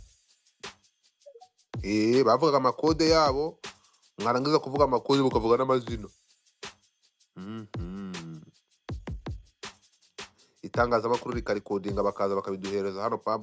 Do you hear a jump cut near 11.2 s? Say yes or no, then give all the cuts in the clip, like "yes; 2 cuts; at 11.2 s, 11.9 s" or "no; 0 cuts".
no; 1 cut; at 1.6 s